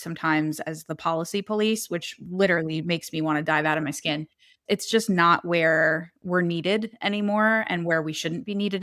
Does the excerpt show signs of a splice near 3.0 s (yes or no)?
no